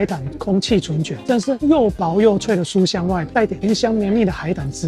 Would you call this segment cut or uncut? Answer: uncut